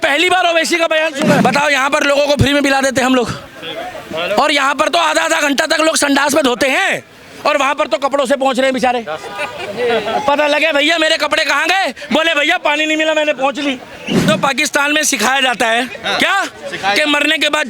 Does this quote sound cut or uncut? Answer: cut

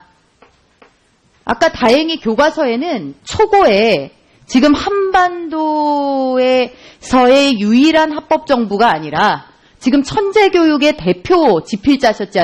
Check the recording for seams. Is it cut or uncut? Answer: uncut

